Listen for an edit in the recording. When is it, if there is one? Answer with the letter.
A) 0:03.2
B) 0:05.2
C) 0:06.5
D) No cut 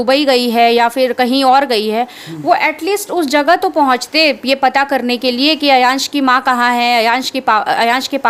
D